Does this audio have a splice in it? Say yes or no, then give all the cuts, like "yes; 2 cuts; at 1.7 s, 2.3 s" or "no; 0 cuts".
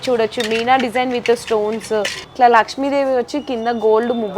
yes; 1 cut; at 2.2 s